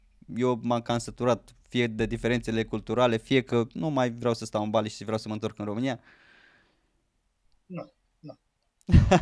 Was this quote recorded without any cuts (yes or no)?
yes